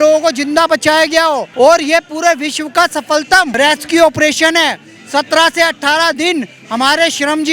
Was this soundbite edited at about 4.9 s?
no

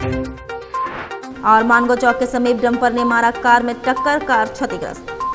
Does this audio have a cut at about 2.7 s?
no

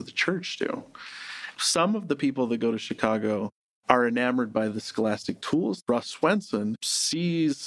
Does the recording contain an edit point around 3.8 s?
no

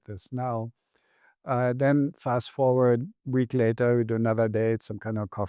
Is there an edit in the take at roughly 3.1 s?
yes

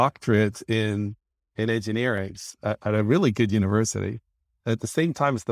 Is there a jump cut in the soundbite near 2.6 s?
no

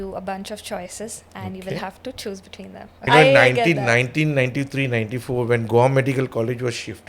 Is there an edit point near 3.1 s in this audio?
yes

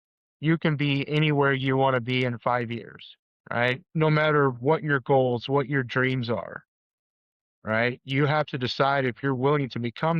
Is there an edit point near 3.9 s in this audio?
yes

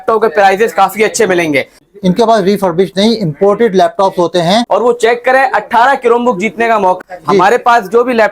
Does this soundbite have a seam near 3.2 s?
no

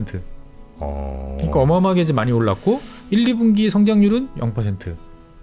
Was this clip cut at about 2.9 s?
yes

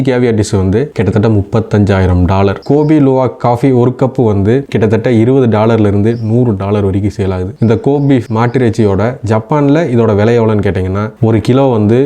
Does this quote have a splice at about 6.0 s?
no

